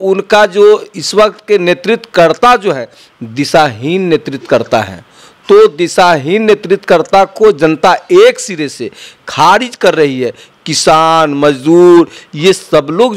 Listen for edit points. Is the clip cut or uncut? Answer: uncut